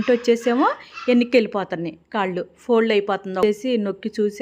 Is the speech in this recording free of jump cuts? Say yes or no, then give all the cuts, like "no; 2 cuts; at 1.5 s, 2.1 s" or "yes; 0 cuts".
no; 1 cut; at 3.4 s